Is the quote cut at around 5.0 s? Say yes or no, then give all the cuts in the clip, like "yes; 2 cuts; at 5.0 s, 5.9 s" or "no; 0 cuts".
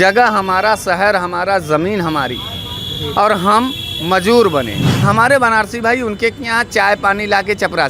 yes; 1 cut; at 5.0 s